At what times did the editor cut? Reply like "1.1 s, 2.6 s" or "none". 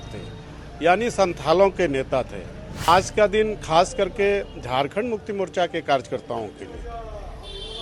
2.9 s